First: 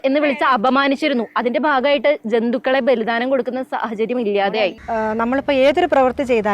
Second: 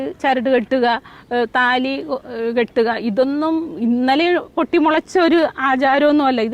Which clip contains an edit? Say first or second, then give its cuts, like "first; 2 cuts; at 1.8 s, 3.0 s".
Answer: first; 1 cut; at 4.6 s